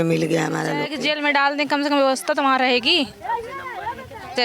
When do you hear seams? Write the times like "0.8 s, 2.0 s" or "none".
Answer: 0.9 s